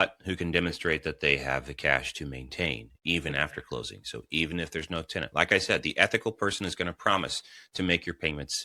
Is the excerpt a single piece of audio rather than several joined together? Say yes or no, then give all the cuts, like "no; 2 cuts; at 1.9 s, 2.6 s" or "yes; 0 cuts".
yes; 0 cuts